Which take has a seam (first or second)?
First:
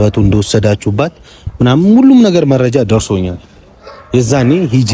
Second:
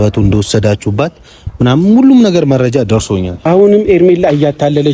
second